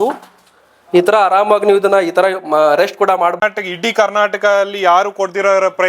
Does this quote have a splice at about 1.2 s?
no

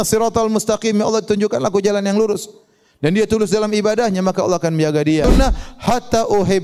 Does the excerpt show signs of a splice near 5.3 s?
yes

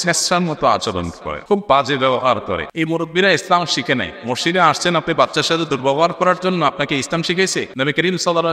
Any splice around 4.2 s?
no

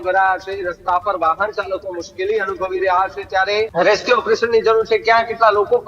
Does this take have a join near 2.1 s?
no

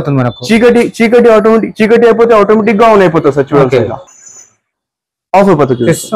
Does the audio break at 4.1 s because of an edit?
no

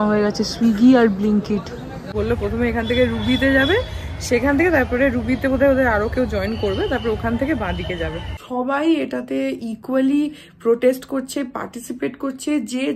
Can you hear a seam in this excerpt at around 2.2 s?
yes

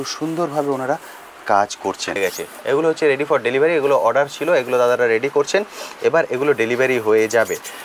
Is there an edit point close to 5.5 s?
no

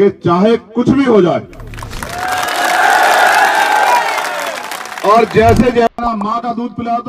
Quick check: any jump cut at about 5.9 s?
yes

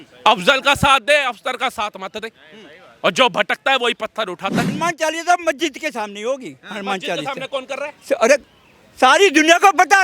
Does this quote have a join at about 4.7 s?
yes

